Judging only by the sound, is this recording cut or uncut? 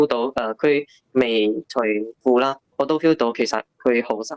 cut